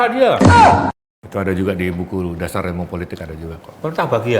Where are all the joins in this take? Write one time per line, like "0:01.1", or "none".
0:01.1

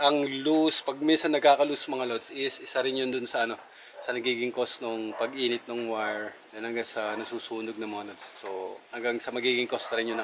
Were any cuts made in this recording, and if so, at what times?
none

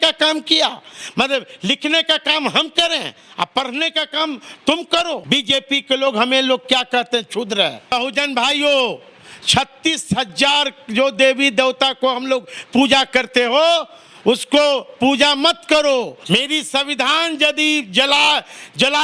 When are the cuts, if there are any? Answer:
0:05.2
0:07.9
0:16.2

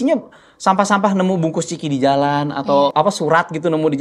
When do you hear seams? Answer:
0:02.9

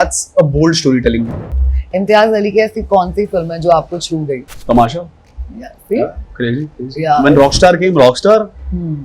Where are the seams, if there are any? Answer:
0:01.4
0:04.5

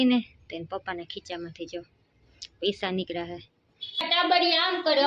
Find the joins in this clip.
0:04.0

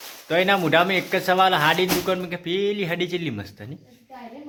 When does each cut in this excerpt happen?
none

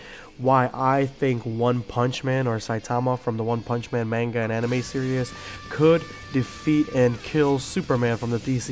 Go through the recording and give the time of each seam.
none

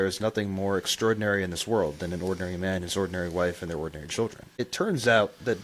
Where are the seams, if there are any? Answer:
0:04.6

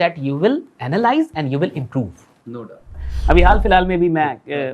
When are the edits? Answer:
0:03.1

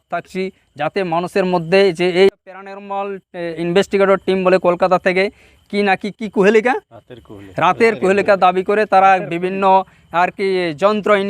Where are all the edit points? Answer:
0:02.3

